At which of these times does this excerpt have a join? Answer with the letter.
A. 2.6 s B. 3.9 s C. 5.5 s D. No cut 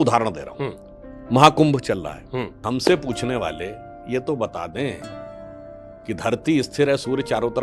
A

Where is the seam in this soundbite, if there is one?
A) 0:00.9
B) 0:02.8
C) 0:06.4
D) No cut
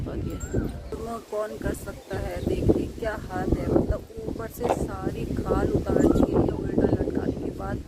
A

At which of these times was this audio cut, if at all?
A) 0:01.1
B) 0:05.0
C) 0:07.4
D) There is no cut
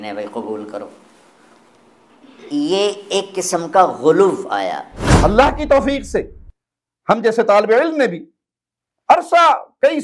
B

